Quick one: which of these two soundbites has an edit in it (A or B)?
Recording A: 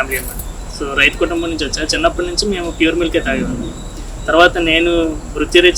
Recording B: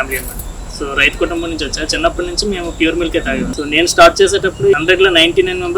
B